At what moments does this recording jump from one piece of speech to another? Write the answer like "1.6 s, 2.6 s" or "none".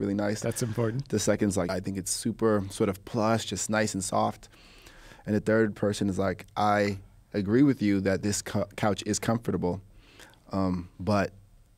1.7 s